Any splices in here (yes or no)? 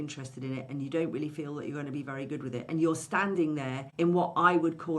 yes